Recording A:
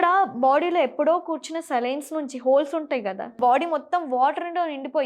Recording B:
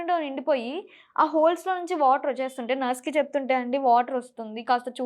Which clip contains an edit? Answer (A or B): A